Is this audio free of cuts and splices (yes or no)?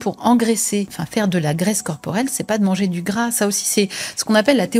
no